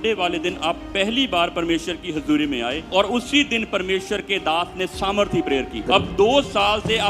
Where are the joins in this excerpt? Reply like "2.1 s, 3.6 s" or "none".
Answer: 2.8 s, 5.9 s